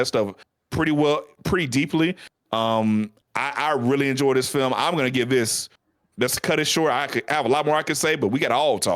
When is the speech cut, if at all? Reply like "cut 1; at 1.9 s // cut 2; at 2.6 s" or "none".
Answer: none